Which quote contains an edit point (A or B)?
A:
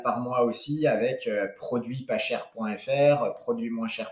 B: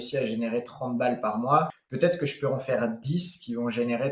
B